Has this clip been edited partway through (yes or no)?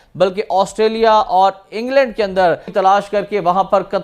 yes